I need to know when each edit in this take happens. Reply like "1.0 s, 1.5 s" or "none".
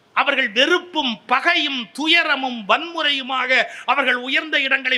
none